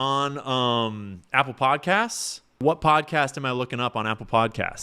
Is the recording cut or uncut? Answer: cut